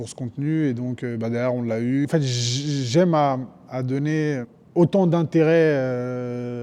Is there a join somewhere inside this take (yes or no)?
yes